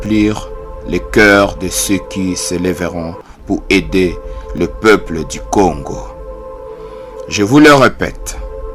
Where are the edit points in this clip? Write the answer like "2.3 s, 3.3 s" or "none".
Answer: 6.0 s, 7.3 s